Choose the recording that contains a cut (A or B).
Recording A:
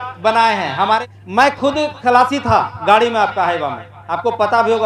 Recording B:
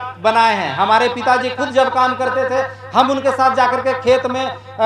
A